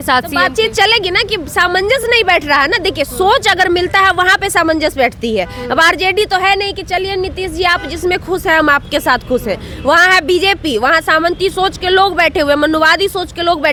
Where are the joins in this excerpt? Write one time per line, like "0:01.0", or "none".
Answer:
none